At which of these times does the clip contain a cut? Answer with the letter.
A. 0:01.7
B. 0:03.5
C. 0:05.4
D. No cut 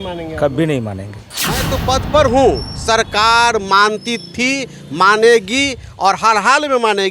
A